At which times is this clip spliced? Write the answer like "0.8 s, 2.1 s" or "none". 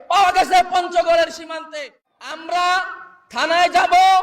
1.7 s

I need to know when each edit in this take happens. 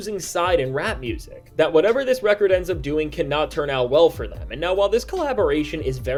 none

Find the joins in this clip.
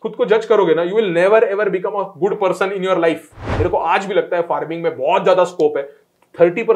3.4 s

